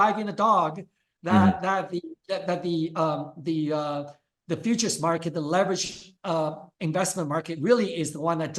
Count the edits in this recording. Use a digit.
0